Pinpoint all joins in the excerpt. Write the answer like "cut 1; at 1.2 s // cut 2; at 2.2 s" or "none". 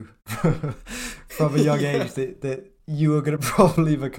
none